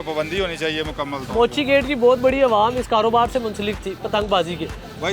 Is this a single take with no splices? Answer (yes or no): yes